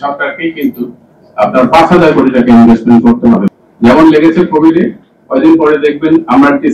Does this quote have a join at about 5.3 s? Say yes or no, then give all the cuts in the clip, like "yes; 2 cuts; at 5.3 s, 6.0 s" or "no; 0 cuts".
no; 1 cut; at 3.5 s